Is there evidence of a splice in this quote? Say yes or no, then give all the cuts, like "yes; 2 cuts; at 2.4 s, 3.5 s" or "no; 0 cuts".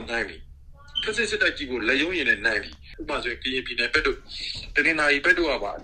yes; 1 cut; at 2.8 s